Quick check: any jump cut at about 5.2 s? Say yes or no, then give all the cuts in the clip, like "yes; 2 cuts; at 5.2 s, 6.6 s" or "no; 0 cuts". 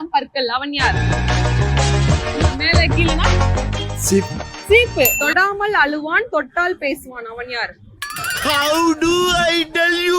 yes; 1 cut; at 5.2 s